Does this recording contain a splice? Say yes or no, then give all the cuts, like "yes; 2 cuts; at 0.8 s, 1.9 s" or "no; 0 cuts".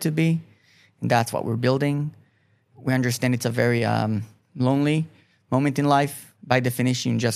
yes; 2 cuts; at 4.4 s, 6.3 s